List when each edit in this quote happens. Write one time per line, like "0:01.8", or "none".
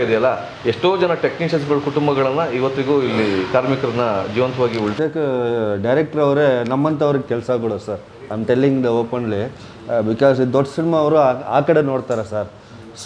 0:05.0